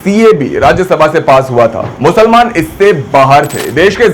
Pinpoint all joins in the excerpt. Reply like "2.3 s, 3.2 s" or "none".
1.8 s